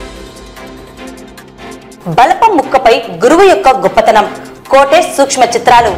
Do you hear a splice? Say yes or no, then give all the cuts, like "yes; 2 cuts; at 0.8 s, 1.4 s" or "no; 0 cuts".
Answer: no; 0 cuts